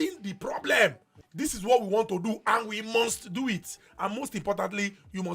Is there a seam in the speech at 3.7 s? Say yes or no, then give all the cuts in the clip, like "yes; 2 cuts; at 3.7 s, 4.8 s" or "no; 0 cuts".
yes; 2 cuts; at 1.2 s, 3.7 s